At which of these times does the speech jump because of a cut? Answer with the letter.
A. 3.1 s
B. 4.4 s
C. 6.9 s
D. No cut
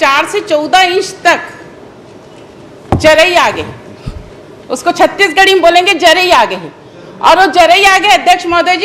D